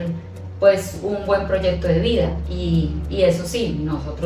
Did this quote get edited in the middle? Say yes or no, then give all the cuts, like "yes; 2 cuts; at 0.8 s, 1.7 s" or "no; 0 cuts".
no; 0 cuts